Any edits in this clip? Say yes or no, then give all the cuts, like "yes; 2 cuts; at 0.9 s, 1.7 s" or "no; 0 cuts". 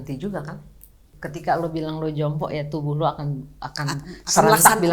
yes; 1 cut; at 1.1 s